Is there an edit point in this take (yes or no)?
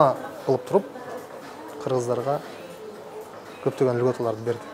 no